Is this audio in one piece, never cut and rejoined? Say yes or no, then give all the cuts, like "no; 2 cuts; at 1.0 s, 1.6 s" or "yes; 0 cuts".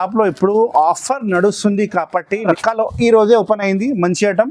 no; 1 cut; at 2.4 s